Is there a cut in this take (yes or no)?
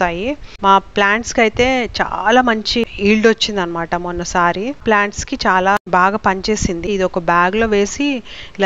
yes